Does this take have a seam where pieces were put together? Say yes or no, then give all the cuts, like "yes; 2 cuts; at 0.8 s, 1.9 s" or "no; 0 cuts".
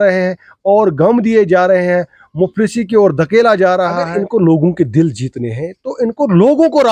yes; 1 cut; at 4.1 s